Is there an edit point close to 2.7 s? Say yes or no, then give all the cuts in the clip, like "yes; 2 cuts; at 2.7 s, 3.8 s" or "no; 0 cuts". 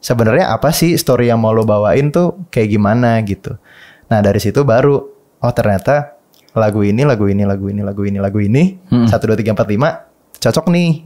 no; 0 cuts